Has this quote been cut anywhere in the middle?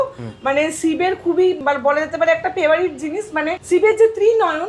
yes; 2 cuts; at 1.6 s, 3.6 s

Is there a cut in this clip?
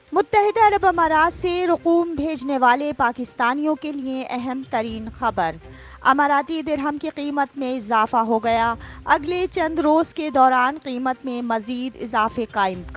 no; 0 cuts

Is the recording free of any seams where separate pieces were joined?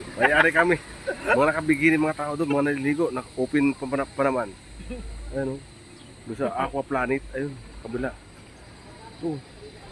yes; 0 cuts

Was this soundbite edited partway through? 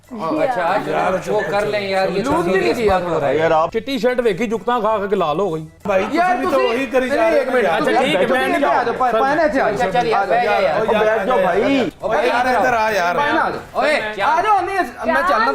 yes; 3 cuts; at 3.7 s, 5.8 s, 12.0 s

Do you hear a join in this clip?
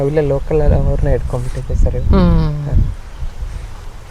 no; 0 cuts

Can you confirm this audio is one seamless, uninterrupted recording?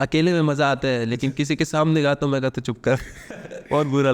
yes; 0 cuts

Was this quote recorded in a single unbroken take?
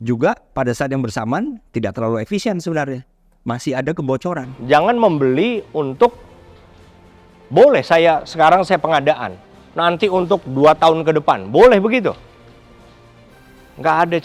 no; 2 cuts; at 4.5 s, 13.3 s

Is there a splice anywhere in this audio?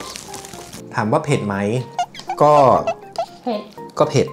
no; 0 cuts

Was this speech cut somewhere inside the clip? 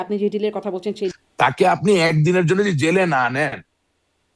yes; 1 cut; at 1.1 s

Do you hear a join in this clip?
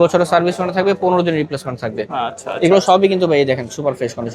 no; 0 cuts

